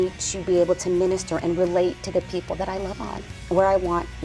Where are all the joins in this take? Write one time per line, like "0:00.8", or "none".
0:03.3

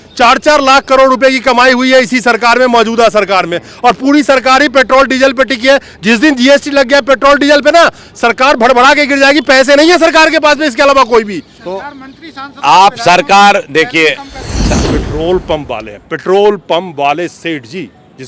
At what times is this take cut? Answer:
0:14.7

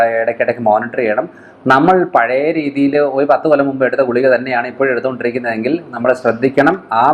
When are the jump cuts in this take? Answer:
none

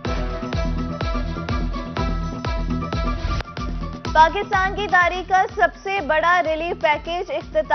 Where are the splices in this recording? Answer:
0:03.4

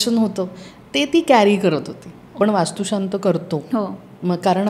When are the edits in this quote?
0:02.3

